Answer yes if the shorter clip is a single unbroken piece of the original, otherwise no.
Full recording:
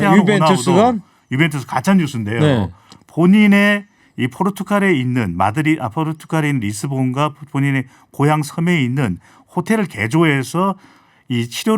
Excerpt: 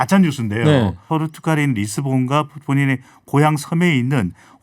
no